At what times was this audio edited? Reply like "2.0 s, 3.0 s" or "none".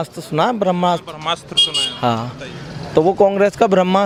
none